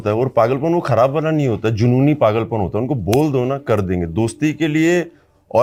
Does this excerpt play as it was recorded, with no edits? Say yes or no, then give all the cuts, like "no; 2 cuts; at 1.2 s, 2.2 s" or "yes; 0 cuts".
yes; 0 cuts